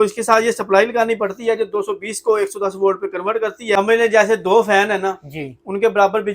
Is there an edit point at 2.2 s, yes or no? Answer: no